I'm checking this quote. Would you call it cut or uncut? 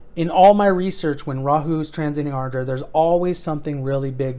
uncut